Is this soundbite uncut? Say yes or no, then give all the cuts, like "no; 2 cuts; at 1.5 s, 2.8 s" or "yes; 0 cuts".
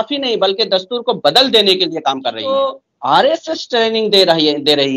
no; 1 cut; at 2.4 s